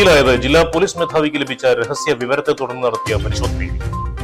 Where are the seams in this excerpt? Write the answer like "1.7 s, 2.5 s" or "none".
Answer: none